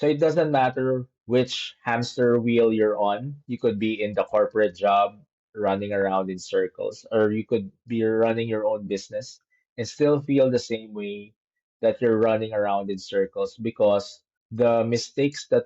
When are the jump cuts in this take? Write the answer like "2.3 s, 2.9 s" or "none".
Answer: 1.1 s